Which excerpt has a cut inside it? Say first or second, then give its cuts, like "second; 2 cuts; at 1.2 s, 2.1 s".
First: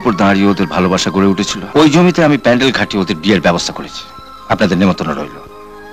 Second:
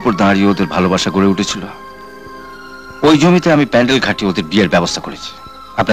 first; 1 cut; at 1.6 s